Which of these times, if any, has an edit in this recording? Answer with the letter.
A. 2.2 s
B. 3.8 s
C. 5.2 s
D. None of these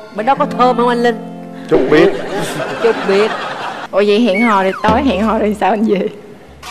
B